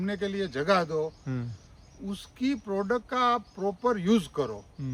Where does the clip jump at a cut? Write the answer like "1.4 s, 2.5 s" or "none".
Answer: none